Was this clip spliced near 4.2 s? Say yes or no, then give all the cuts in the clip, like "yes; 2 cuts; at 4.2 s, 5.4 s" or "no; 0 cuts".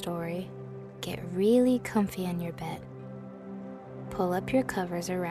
yes; 2 cuts; at 2.8 s, 4.2 s